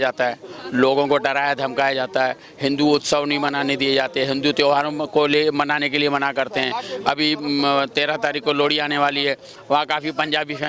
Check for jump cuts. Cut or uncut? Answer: uncut